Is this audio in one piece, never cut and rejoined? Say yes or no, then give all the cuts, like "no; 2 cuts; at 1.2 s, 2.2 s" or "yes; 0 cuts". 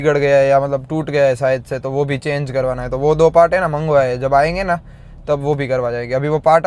yes; 0 cuts